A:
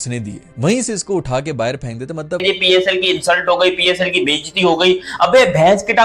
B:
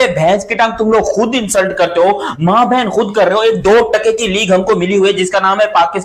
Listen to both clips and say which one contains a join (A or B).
A